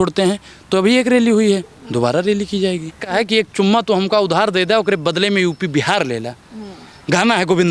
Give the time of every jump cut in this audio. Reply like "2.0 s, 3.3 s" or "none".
3.1 s